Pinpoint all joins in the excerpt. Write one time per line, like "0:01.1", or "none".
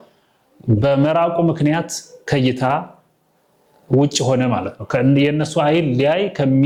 none